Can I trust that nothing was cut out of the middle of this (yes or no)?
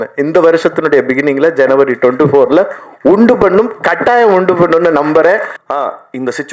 no